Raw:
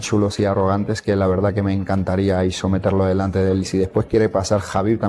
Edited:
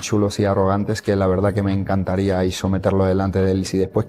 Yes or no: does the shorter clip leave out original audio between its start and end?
no